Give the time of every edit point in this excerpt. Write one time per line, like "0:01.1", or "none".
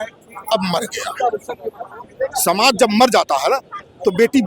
0:02.0